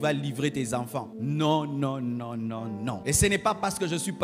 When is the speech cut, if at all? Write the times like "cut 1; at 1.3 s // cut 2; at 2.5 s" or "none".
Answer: cut 1; at 1.1 s // cut 2; at 3.0 s